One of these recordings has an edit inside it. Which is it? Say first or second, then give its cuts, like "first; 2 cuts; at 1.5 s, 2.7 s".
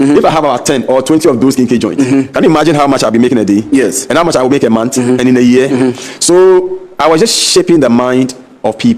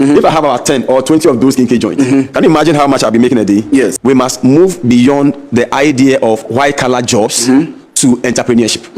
second; 1 cut; at 4.0 s